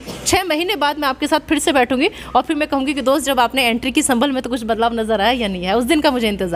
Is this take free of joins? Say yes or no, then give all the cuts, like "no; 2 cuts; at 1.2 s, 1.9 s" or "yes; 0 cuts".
yes; 0 cuts